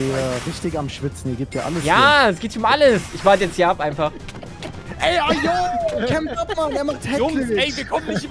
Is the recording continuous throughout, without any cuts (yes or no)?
no